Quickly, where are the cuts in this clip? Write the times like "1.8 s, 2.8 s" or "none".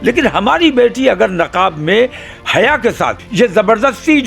3.2 s